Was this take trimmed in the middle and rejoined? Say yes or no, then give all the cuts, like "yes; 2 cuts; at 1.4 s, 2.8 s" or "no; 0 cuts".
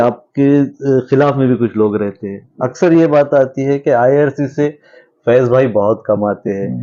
no; 0 cuts